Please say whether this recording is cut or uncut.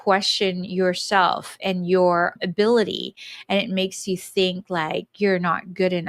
cut